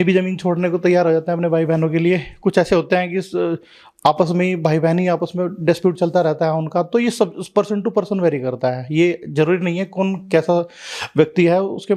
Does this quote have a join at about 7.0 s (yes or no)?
no